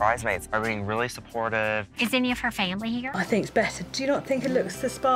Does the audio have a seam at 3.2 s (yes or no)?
yes